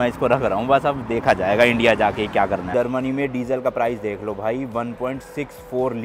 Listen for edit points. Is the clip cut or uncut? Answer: cut